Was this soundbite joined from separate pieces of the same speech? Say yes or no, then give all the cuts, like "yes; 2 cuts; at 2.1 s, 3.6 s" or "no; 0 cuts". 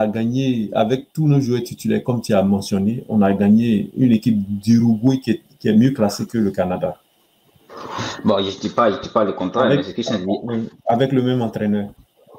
no; 0 cuts